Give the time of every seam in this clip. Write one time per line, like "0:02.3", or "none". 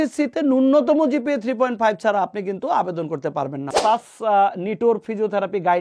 0:03.8